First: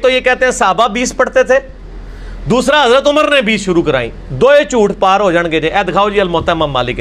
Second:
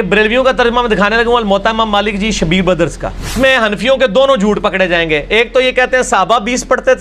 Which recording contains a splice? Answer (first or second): second